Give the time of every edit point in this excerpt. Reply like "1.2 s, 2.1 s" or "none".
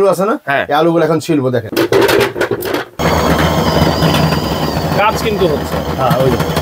1.6 s, 3.0 s